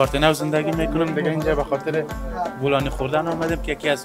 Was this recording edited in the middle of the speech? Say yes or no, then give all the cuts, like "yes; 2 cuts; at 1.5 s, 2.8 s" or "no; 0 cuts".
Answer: no; 0 cuts